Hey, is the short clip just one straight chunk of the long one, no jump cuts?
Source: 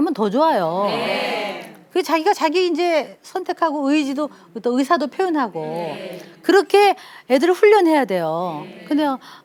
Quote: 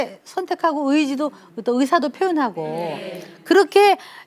yes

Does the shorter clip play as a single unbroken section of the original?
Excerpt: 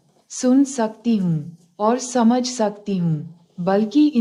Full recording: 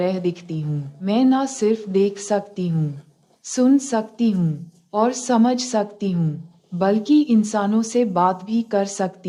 yes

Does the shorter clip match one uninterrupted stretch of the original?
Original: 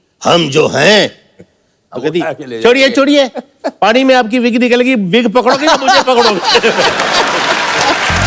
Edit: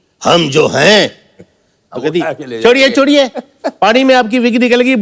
yes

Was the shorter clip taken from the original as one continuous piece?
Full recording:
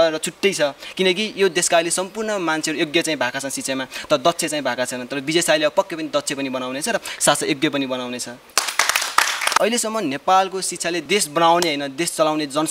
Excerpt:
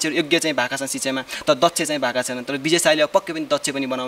yes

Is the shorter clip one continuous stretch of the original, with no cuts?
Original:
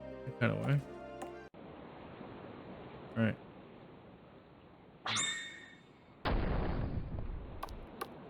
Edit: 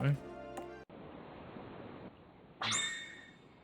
no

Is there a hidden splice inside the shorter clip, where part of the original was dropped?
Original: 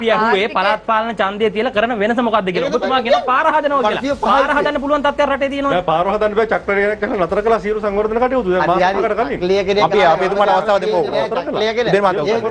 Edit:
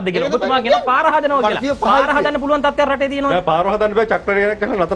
no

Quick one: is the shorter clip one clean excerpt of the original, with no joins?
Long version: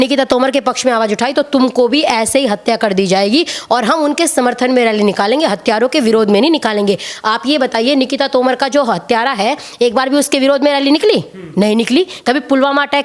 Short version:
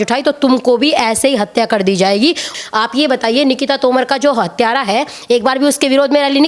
no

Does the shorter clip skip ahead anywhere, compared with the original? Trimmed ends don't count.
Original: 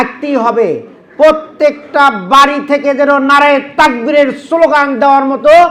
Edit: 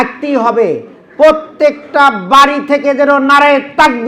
no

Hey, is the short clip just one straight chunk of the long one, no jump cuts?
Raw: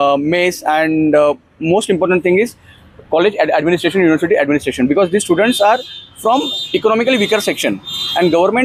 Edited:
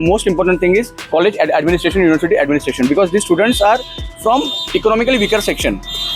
no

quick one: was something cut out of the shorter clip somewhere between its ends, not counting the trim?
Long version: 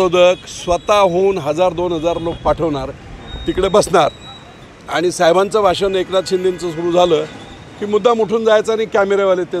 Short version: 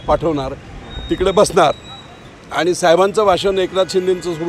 no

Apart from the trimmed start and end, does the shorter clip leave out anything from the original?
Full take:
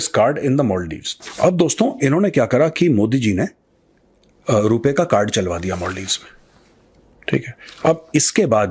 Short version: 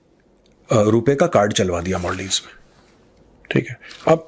no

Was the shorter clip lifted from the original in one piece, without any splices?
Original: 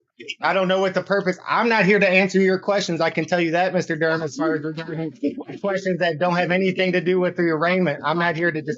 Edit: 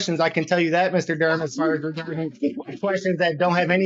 yes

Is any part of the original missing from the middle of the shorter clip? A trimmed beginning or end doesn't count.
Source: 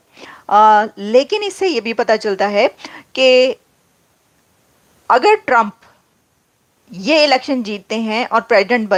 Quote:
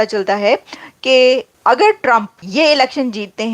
yes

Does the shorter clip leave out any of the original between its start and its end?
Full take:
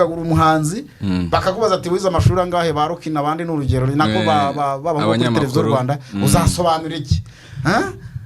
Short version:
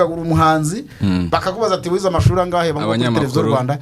yes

